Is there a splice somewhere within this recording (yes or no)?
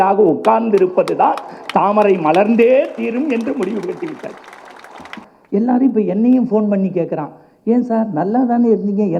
yes